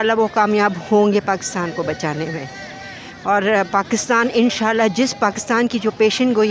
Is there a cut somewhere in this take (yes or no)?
no